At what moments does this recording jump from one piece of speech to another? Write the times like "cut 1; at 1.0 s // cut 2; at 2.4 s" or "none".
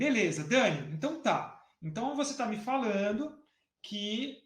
none

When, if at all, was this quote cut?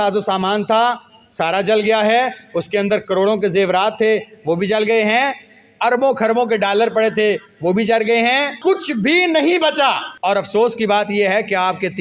cut 1; at 8.6 s // cut 2; at 10.1 s

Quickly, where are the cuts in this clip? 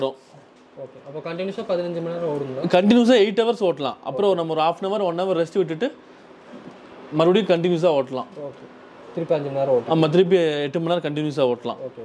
none

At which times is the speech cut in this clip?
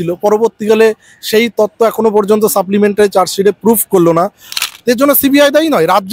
cut 1; at 4.5 s

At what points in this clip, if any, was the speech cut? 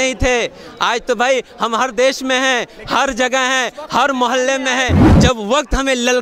cut 1; at 5.1 s

